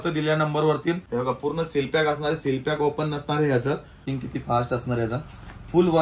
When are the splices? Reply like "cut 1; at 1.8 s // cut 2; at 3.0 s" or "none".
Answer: cut 1; at 1.0 s // cut 2; at 4.1 s